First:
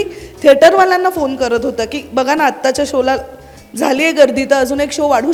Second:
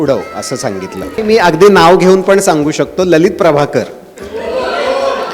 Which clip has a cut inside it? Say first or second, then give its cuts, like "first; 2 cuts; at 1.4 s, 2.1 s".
second; 1 cut; at 1.1 s